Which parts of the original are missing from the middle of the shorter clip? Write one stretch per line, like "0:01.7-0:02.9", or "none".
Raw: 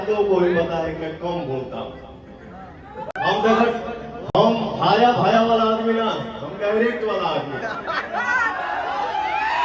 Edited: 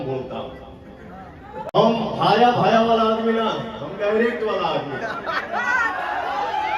0:03.1-0:04.3